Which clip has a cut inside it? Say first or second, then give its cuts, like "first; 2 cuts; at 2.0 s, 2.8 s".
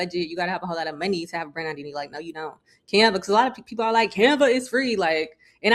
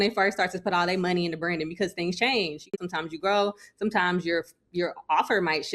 second; 1 cut; at 2.7 s